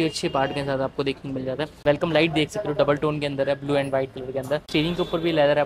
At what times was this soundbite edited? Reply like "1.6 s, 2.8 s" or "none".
1.8 s, 4.7 s